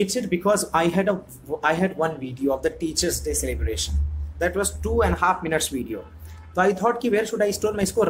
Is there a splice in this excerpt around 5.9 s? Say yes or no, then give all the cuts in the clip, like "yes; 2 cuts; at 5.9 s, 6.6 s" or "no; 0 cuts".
no; 0 cuts